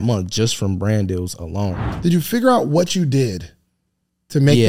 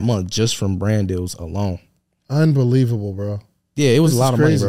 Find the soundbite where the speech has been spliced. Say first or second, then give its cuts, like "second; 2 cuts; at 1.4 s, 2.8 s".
first; 1 cut; at 1.8 s